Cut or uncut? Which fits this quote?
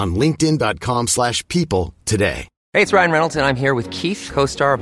cut